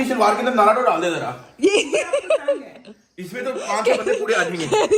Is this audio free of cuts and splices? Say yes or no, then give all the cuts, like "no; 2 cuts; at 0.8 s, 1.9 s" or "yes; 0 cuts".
yes; 0 cuts